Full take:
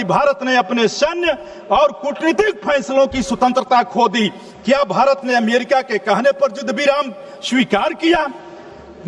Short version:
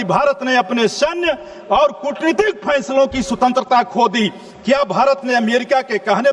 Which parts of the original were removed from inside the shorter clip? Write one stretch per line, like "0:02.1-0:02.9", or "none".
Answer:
none

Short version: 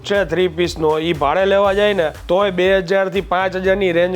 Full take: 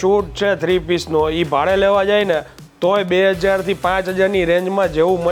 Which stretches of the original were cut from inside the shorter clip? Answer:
0:02.5-0:02.7

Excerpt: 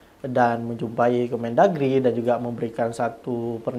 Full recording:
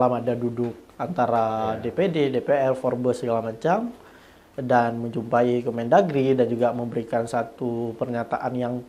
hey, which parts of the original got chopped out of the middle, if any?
none

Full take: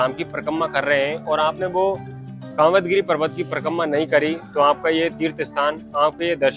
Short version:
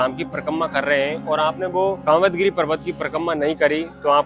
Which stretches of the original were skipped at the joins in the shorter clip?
0:02.0-0:02.5

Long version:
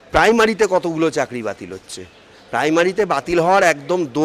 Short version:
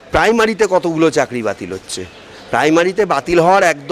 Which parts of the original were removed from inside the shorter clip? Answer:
none

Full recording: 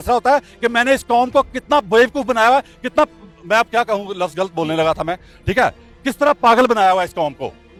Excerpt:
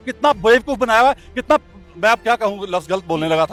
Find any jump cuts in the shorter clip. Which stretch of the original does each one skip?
none

